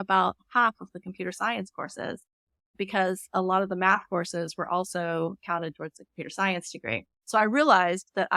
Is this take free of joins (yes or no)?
yes